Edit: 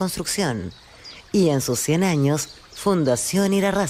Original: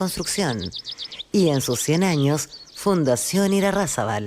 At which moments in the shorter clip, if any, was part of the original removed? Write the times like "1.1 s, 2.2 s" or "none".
none